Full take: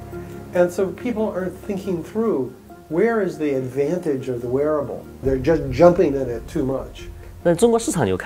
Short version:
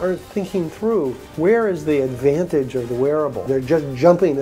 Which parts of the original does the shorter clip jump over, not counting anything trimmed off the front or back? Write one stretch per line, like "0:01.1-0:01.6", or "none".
0:02.6-0:02.8
0:04.9-0:05.1